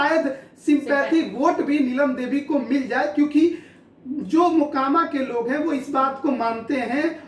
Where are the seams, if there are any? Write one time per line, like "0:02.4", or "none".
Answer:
none